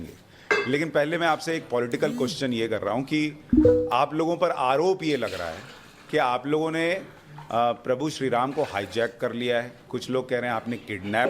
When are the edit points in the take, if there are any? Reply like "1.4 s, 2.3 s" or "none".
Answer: 1.6 s